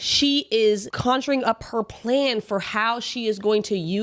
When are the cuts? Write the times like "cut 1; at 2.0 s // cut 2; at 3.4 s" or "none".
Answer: cut 1; at 0.9 s